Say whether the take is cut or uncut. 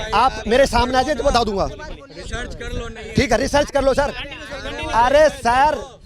uncut